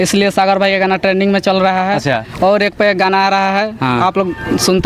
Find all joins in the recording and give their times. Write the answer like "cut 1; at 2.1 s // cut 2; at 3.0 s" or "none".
none

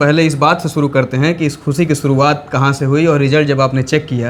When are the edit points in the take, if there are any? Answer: none

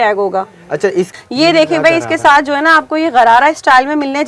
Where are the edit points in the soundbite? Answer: cut 1; at 1.1 s

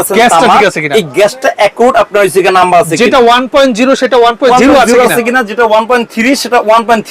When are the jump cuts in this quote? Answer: none

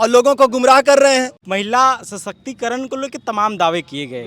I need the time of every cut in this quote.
cut 1; at 1.4 s

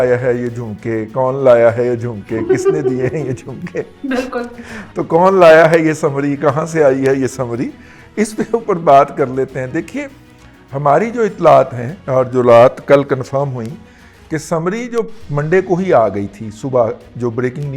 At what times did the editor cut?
none

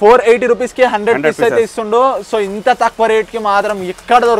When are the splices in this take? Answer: none

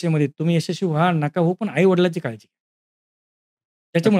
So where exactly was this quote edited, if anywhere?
none

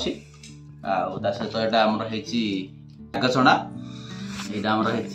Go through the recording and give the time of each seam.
cut 1; at 3.2 s

